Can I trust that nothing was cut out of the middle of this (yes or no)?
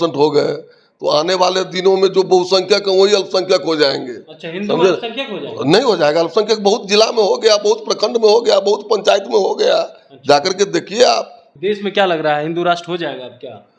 no